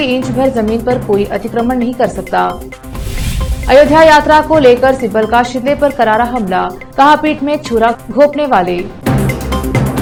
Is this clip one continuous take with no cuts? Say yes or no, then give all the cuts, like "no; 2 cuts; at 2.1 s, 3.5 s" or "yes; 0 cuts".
yes; 0 cuts